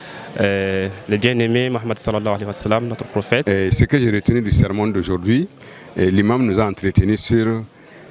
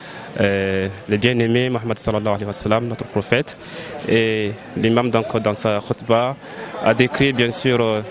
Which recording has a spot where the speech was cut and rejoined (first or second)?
first